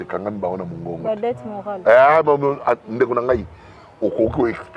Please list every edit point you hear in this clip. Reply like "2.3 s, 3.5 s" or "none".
none